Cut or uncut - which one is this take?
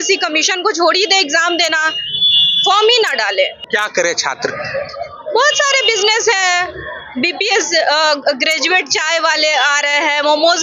cut